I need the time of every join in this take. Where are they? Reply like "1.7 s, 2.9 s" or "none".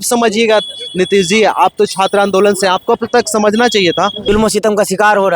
4.2 s